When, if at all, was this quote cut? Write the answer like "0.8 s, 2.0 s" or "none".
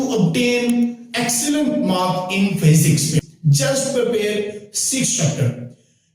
3.3 s